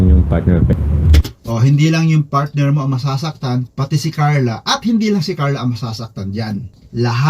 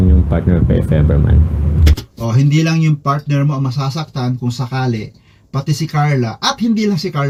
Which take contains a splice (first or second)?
first